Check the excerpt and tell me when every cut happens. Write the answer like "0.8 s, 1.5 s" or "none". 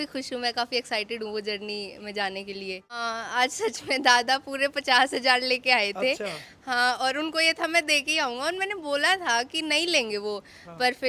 3.1 s